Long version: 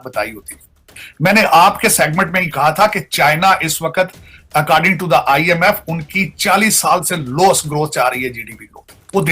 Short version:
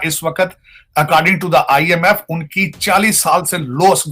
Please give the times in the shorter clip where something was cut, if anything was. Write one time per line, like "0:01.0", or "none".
none